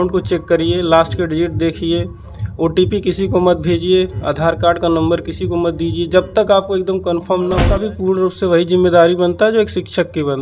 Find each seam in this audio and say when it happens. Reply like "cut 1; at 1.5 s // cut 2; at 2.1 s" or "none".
cut 1; at 7.7 s